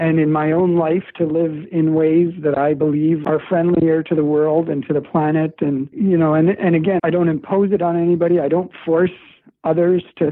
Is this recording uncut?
no; 1 cut; at 3.2 s

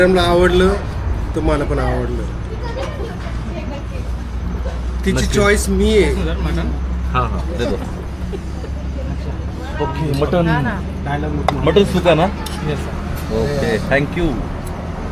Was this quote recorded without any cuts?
yes; 0 cuts

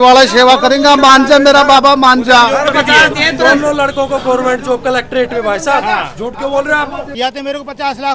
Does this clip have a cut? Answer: yes; 2 cuts; at 2.7 s, 7.1 s

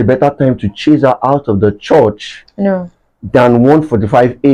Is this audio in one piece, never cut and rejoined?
yes; 0 cuts

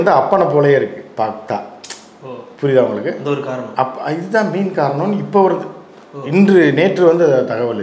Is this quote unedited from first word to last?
yes; 0 cuts

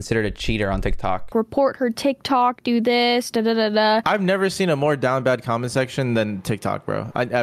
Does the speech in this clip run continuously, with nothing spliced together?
no; 2 cuts; at 1.3 s, 4.0 s

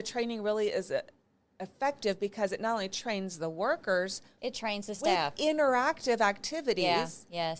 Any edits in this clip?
no; 0 cuts

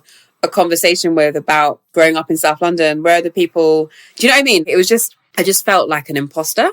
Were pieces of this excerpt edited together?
yes; 2 cuts; at 1.8 s, 5.2 s

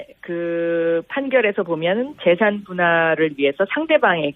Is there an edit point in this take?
yes; 1 cut; at 2.2 s

